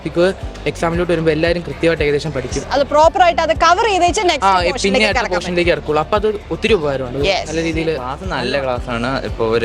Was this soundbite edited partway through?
yes; 1 cut; at 8.2 s

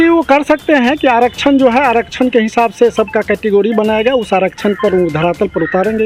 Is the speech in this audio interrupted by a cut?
no; 0 cuts

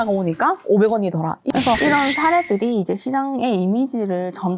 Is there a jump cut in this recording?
yes; 1 cut; at 1.4 s

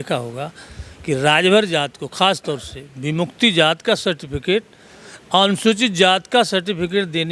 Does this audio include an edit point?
no; 0 cuts

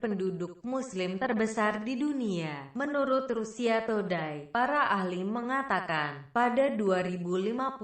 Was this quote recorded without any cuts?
no; 1 cut; at 3.1 s

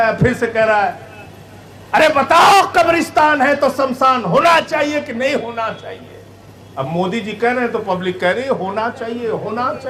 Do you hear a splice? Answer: no; 0 cuts

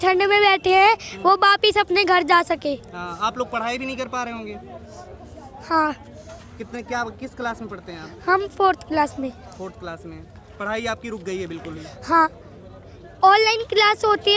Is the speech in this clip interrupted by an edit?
no; 0 cuts

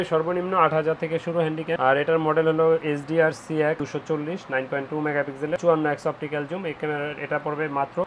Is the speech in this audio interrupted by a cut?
no; 0 cuts

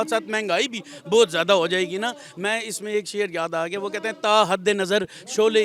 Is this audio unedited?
yes; 0 cuts

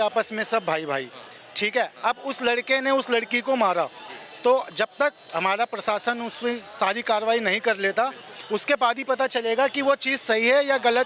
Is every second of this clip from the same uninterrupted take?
yes; 0 cuts

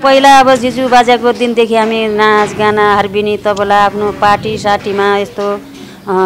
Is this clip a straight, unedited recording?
yes; 0 cuts

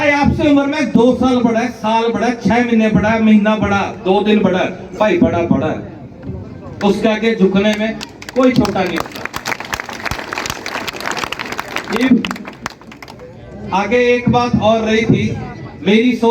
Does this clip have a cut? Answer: no; 0 cuts

